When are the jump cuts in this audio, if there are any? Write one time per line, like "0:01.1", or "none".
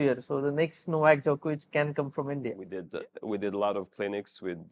0:02.7